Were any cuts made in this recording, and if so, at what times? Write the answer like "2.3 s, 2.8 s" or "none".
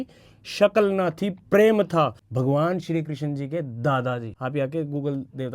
2.2 s, 4.3 s